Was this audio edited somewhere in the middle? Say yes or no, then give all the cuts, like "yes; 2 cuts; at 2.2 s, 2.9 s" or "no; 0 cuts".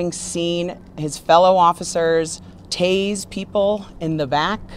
no; 0 cuts